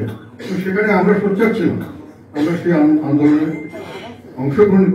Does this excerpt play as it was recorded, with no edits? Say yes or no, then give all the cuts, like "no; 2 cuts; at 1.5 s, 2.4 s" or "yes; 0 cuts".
yes; 0 cuts